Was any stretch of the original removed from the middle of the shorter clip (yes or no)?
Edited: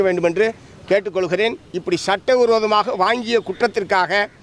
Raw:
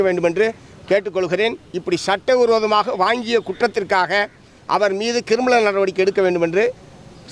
no